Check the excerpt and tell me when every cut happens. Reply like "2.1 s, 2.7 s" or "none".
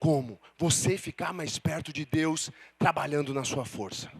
none